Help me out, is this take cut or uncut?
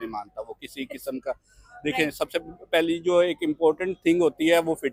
uncut